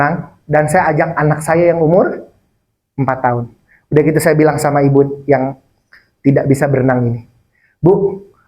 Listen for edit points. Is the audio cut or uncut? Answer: uncut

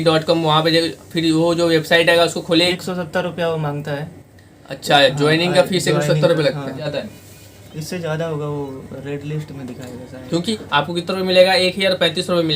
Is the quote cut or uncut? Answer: cut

